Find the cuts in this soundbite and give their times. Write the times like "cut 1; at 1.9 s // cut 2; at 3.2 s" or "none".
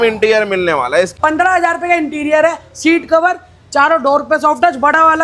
cut 1; at 1.1 s